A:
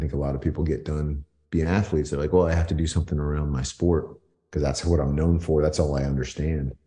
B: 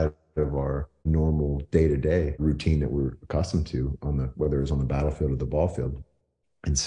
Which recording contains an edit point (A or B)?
B